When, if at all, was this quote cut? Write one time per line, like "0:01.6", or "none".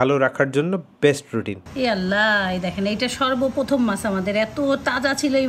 0:01.6